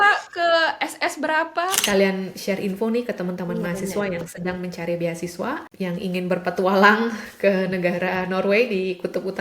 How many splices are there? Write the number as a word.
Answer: two